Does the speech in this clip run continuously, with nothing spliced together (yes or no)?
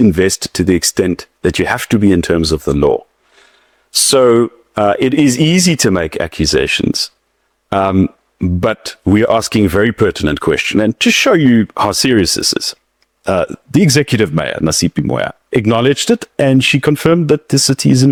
yes